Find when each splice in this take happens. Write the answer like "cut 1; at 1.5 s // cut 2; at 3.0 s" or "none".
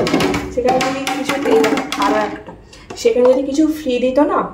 none